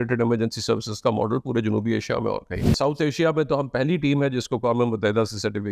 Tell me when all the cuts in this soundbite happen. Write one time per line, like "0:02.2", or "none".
0:02.7